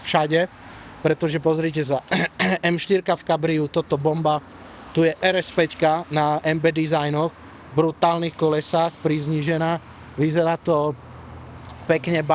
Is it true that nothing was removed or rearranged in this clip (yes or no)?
yes